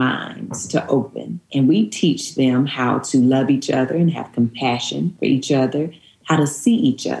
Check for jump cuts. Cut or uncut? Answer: cut